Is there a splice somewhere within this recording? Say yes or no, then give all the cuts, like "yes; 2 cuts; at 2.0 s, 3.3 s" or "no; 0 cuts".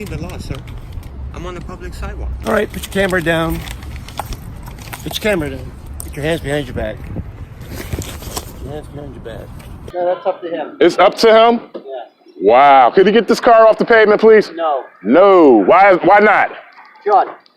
yes; 2 cuts; at 2.3 s, 9.8 s